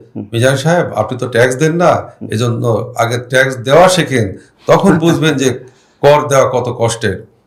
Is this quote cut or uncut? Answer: uncut